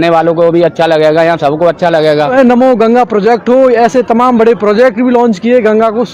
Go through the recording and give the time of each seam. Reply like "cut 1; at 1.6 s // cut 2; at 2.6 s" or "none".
cut 1; at 2.3 s